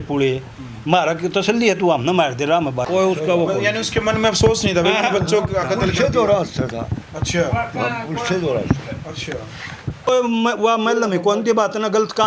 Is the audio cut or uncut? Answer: cut